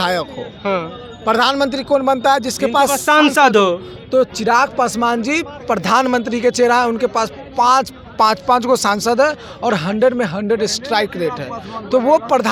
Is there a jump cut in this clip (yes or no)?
no